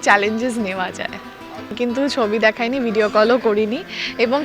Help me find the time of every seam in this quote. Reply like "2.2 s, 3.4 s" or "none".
1.8 s